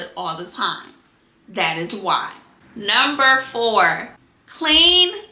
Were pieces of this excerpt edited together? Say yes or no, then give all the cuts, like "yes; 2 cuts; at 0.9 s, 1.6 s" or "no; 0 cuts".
no; 0 cuts